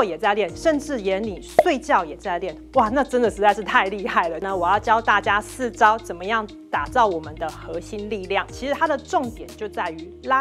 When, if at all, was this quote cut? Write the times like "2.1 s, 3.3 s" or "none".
4.4 s, 8.5 s